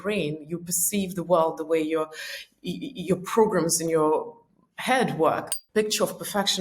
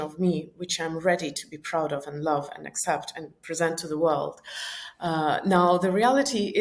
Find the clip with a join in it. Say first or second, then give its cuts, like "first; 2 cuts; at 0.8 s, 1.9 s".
first; 1 cut; at 5.6 s